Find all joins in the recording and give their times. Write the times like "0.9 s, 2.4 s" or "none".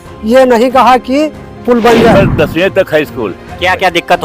2.1 s